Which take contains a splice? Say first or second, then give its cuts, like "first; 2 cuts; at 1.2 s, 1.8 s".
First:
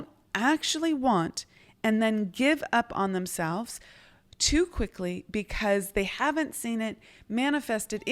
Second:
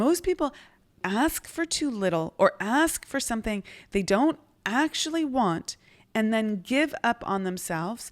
second; 1 cut; at 1.0 s